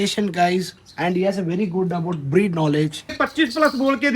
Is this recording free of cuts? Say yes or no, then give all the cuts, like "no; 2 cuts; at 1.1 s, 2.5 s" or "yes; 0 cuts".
no; 1 cut; at 3.2 s